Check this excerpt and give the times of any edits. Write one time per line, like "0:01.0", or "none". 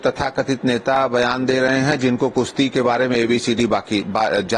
none